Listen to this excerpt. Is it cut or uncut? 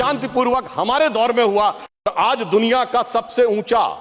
cut